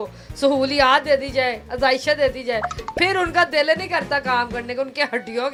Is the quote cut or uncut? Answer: uncut